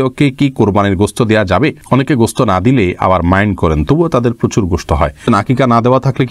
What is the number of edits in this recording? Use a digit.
2